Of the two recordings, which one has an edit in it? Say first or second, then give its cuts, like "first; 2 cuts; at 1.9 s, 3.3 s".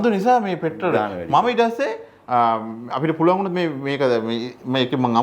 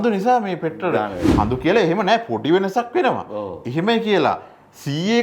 second; 1 cut; at 1.2 s